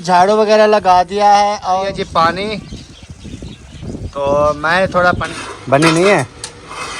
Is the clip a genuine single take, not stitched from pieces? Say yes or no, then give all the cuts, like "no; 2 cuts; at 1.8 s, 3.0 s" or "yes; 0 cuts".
no; 2 cuts; at 1.8 s, 5.3 s